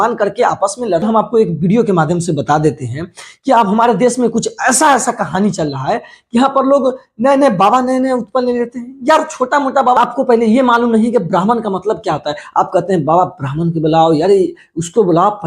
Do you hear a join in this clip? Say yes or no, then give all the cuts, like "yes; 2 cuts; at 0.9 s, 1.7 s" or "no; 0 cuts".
yes; 2 cuts; at 1.0 s, 10.0 s